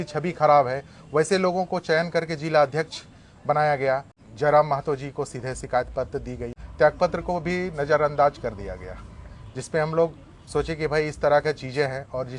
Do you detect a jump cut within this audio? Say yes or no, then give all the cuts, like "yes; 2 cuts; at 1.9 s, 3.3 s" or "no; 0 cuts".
yes; 2 cuts; at 4.1 s, 6.6 s